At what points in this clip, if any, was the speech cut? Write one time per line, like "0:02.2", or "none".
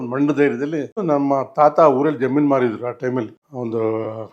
0:01.0
0:03.4